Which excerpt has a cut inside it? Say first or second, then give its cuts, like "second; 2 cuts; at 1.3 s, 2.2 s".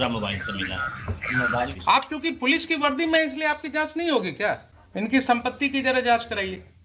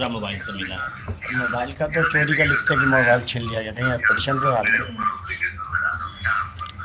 first; 2 cuts; at 1.7 s, 4.8 s